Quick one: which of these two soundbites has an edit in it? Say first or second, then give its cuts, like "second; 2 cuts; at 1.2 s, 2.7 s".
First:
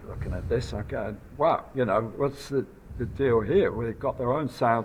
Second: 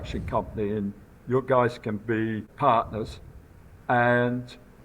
second; 1 cut; at 2.5 s